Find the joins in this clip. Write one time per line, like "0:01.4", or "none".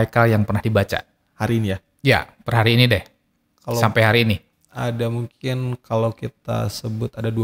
none